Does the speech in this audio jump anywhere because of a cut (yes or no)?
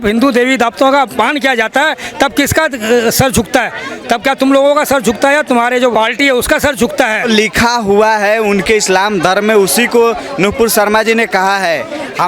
yes